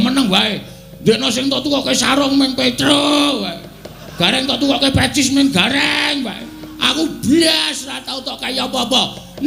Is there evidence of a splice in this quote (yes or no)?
no